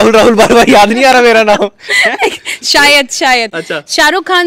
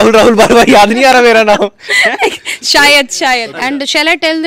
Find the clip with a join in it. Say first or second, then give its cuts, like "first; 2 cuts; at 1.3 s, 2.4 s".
second; 1 cut; at 3.5 s